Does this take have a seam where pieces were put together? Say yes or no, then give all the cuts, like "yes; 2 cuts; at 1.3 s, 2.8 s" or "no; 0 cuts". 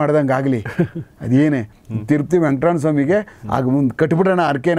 no; 0 cuts